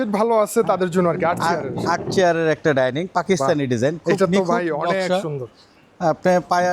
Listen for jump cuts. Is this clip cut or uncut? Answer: uncut